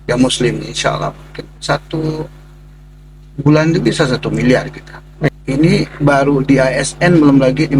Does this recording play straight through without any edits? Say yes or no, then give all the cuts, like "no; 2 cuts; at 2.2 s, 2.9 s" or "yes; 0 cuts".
no; 1 cut; at 5.3 s